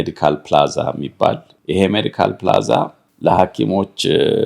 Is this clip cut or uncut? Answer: cut